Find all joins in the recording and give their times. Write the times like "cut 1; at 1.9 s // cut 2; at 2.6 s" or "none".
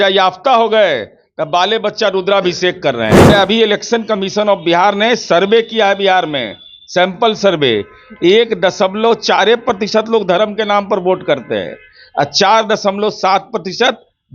cut 1; at 3.3 s